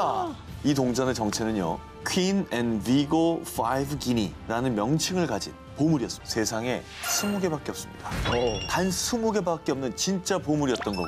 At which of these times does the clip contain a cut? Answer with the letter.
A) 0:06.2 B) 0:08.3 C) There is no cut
A